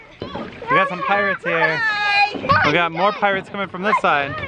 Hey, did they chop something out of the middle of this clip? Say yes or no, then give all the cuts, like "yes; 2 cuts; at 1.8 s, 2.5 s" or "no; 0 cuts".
yes; 1 cut; at 2.4 s